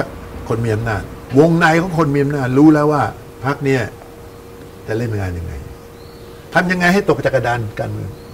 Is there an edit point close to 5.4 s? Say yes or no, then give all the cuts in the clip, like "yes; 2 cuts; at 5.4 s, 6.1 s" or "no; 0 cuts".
no; 2 cuts; at 1.2 s, 3.3 s